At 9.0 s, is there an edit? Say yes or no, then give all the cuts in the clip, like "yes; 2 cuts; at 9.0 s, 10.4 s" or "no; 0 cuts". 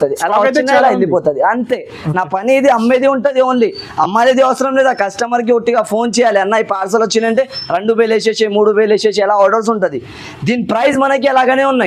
no; 0 cuts